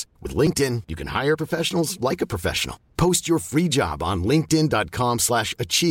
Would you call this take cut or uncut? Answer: uncut